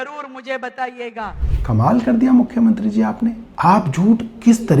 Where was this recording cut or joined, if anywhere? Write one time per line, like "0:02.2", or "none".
0:03.4